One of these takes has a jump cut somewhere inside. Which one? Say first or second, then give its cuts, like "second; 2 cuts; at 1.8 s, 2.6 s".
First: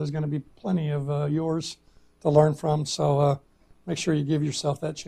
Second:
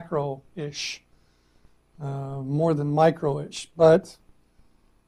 first; 1 cut; at 2.3 s